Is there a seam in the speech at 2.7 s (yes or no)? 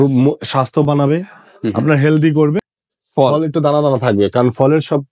yes